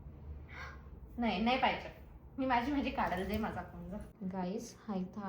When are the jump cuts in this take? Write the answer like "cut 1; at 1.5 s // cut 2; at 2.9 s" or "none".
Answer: cut 1; at 4.1 s